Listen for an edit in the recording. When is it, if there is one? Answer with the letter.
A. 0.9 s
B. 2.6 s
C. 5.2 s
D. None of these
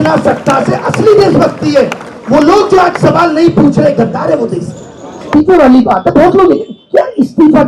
C